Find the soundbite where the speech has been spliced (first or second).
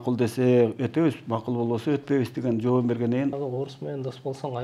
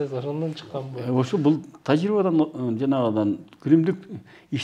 first